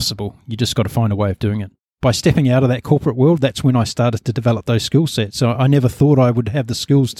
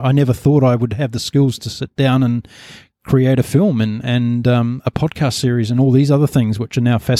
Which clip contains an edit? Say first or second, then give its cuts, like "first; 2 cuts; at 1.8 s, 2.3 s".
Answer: first; 1 cut; at 1.9 s